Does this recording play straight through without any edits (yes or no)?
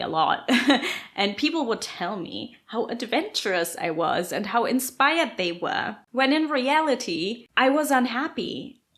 no